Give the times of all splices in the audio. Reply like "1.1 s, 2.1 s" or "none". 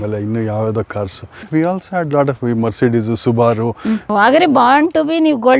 1.4 s, 4.1 s